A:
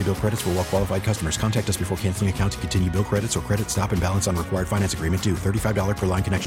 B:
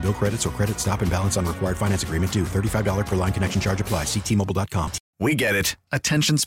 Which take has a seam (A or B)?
B